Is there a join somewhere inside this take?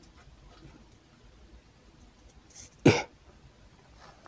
no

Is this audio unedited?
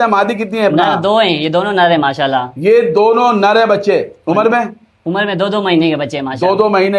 yes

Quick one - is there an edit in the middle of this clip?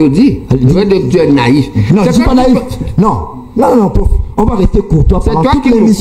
no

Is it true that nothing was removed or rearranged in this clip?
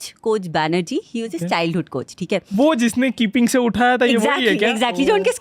yes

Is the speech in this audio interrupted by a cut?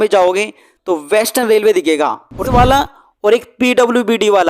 yes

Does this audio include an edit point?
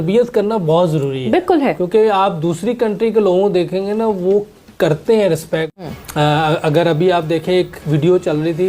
yes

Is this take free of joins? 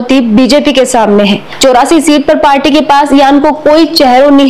no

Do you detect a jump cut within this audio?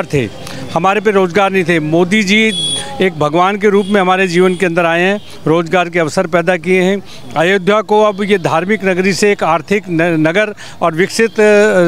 no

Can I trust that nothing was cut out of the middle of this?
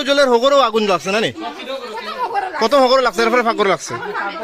yes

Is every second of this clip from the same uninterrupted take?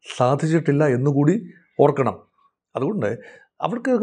yes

